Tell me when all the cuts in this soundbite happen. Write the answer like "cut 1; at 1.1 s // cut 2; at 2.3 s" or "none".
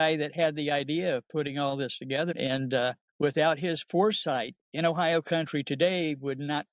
none